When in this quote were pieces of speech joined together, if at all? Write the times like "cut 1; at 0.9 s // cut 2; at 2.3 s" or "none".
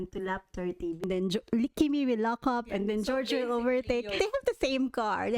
cut 1; at 1.0 s // cut 2; at 4.1 s